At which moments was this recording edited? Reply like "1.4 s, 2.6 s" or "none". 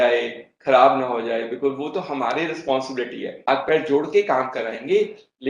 3.3 s